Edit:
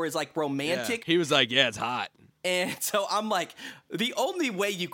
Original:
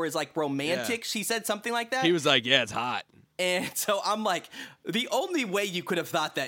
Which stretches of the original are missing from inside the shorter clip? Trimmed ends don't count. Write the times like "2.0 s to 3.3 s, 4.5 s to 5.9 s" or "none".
1.1 s to 2.0 s